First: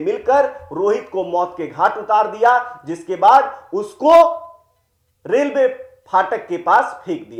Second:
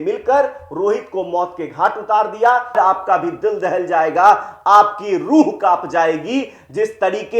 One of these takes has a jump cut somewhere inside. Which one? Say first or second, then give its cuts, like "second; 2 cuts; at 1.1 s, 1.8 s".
second; 1 cut; at 2.7 s